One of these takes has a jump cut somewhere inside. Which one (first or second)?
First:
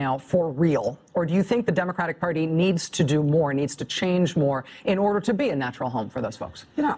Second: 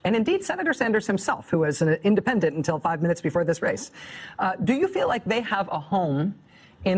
second